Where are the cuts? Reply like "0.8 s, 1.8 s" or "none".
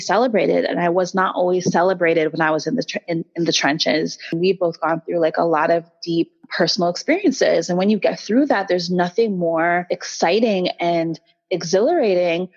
4.3 s, 6.5 s, 10.0 s